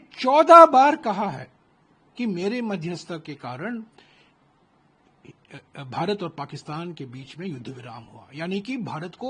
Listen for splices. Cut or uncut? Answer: uncut